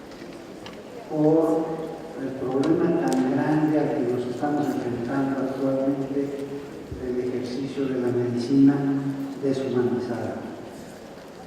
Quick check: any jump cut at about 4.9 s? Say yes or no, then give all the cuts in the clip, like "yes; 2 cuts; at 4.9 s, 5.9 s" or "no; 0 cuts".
yes; 1 cut; at 4.9 s